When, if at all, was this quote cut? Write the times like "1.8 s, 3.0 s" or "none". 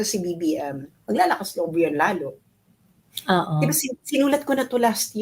none